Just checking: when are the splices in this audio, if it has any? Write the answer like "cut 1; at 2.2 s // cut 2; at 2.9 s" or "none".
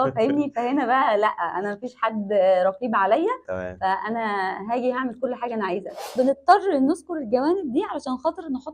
cut 1; at 6.0 s